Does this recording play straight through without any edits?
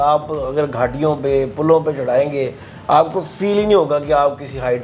yes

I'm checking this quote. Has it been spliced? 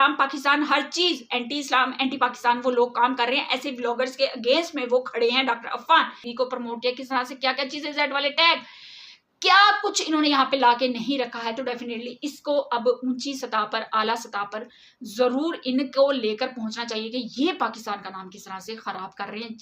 yes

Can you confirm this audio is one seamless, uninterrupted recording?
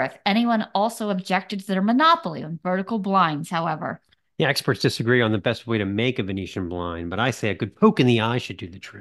yes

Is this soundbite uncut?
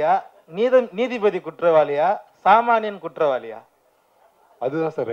yes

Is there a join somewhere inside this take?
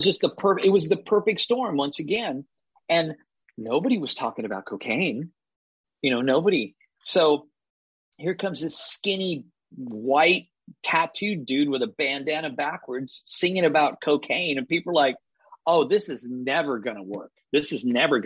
no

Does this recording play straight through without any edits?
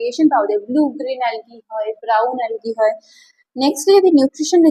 yes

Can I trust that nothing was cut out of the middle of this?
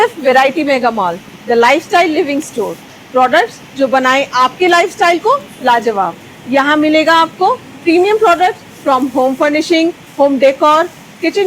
yes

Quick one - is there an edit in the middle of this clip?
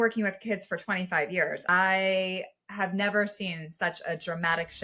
yes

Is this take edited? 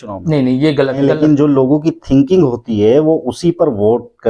yes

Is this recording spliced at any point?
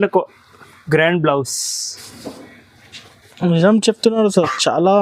no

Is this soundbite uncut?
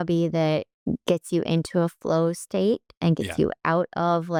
yes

